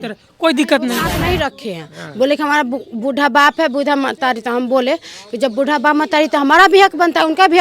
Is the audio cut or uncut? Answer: cut